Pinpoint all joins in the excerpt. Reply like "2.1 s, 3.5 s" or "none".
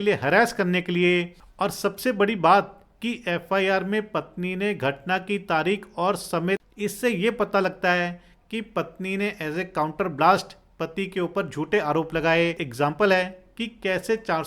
1.4 s, 6.6 s, 12.6 s